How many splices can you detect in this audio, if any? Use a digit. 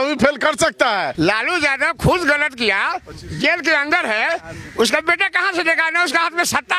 1